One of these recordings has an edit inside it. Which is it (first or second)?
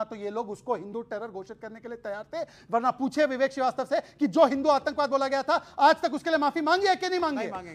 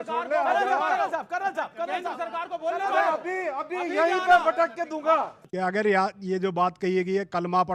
second